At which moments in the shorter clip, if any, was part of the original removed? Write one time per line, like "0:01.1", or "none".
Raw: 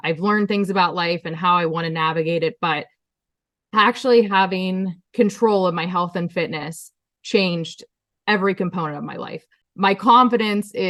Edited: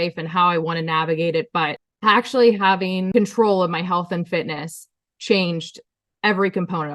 0:01.8
0:03.0